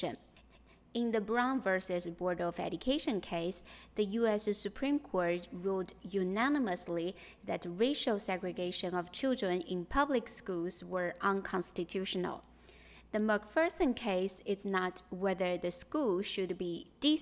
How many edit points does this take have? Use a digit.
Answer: 0